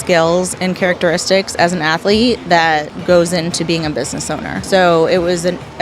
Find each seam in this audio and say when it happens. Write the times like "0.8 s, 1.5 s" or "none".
2.9 s, 4.5 s